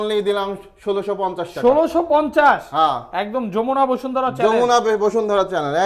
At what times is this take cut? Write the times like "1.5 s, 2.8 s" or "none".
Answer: none

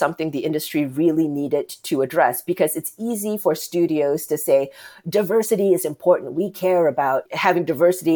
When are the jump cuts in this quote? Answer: 7.3 s

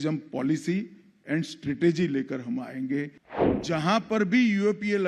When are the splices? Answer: 3.3 s

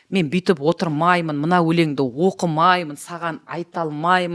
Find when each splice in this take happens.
none

